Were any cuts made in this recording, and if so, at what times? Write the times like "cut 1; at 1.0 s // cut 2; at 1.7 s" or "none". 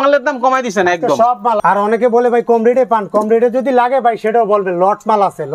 cut 1; at 1.6 s

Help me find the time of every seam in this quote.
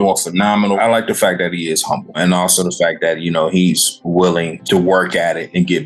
cut 1; at 0.8 s // cut 2; at 2.2 s // cut 3; at 4.6 s

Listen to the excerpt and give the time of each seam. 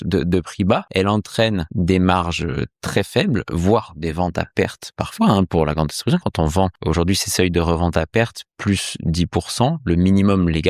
cut 1; at 0.9 s // cut 2; at 1.7 s // cut 3; at 6.8 s

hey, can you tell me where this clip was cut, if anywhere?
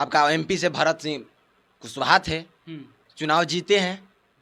none

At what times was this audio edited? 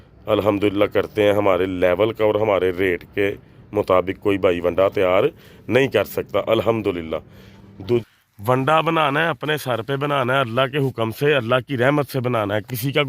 cut 1; at 8.0 s

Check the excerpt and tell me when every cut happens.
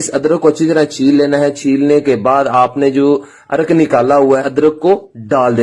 cut 1; at 4.4 s

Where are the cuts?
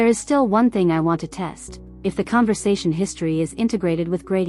none

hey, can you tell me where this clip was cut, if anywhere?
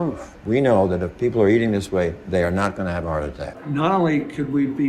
cut 1; at 3.5 s

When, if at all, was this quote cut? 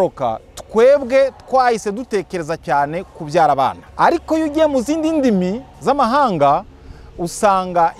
cut 1; at 3.8 s

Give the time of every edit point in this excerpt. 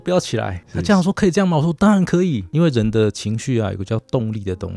cut 1; at 2.4 s

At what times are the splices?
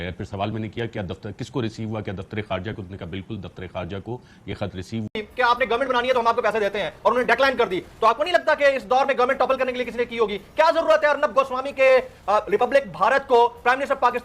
cut 1; at 5.1 s

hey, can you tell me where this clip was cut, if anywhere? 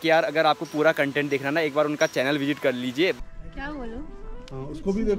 cut 1; at 3.2 s

